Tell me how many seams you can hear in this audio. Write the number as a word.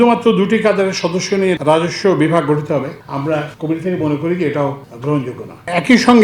one